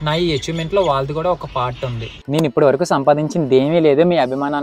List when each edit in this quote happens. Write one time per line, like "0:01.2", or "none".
none